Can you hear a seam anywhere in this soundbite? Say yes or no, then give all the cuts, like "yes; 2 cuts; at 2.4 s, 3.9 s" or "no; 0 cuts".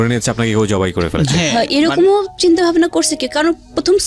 no; 0 cuts